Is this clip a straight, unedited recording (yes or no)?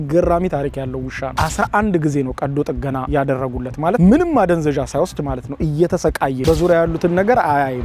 no